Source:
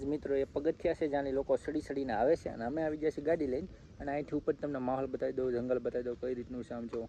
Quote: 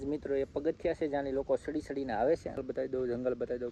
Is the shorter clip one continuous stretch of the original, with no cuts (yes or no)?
no